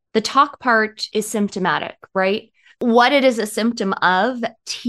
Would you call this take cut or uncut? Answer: cut